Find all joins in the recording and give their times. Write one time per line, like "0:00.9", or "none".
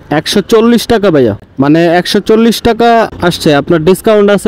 0:01.4
0:03.1